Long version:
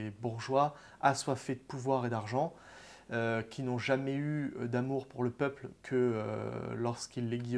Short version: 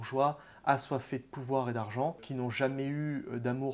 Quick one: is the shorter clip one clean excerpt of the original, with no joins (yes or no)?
no